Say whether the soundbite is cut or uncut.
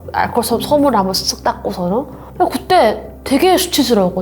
uncut